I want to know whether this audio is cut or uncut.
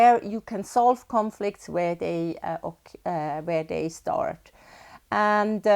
uncut